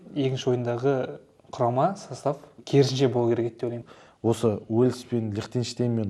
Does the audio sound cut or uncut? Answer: cut